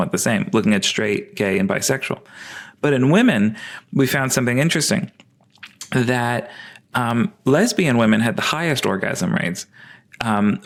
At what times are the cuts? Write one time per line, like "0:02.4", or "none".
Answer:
none